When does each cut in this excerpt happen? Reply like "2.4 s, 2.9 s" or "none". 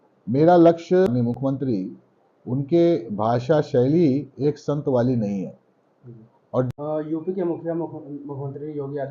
1.3 s, 6.7 s